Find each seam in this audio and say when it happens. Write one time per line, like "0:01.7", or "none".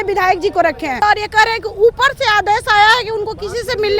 0:01.0